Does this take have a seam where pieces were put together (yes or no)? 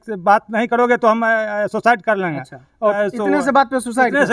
yes